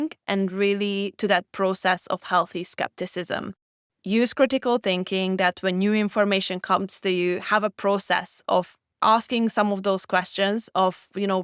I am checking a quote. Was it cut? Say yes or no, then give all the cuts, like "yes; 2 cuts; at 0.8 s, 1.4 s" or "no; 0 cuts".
yes; 1 cut; at 8.8 s